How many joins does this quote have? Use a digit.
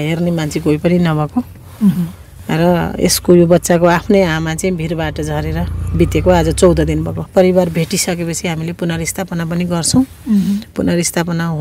1